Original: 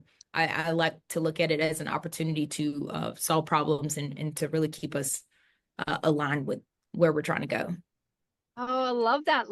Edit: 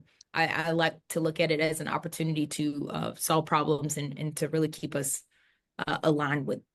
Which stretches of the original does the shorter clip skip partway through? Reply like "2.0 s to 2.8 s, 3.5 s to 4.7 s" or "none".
none